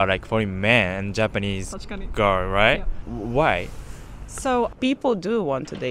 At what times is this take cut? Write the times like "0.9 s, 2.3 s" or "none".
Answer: 4.7 s